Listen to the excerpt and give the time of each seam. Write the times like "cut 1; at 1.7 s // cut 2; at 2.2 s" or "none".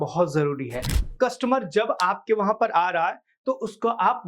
cut 1; at 1.0 s